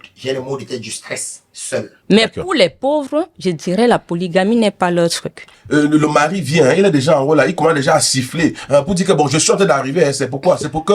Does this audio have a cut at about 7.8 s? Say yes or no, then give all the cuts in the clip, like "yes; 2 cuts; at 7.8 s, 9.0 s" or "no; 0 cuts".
no; 2 cuts; at 2.0 s, 5.5 s